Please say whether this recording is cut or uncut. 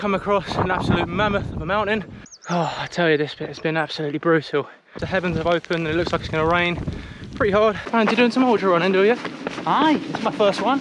cut